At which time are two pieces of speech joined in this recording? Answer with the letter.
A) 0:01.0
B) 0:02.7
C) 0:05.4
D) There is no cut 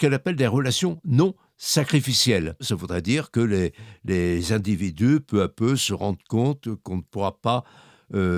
B